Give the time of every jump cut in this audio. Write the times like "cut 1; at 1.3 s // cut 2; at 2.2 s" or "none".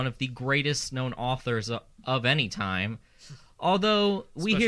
none

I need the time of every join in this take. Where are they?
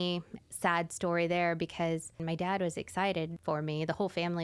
cut 1; at 2.2 s // cut 2; at 3.4 s

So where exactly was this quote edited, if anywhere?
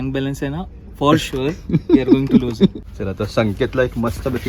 cut 1; at 2.8 s

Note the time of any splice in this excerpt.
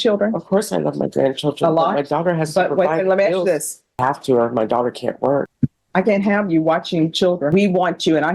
cut 1; at 4.0 s // cut 2; at 5.5 s // cut 3; at 7.5 s

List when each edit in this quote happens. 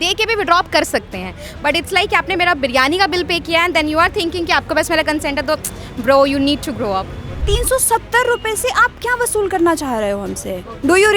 cut 1; at 7.4 s

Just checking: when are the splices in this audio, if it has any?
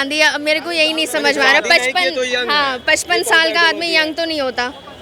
none

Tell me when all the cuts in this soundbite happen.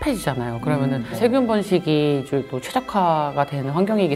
none

